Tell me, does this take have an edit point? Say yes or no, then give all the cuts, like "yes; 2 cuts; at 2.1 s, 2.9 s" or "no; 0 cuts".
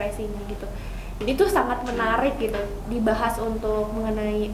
no; 0 cuts